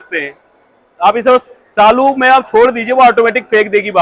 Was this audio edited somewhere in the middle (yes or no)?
no